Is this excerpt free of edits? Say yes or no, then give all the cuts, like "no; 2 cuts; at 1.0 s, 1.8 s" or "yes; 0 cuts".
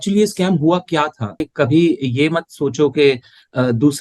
no; 1 cut; at 1.4 s